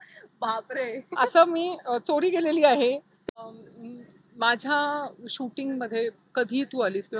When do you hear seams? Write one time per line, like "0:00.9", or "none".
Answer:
0:03.5